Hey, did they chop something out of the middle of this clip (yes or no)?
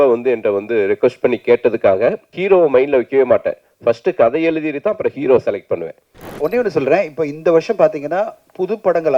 yes